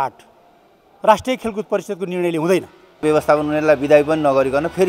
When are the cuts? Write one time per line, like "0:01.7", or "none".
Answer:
0:03.0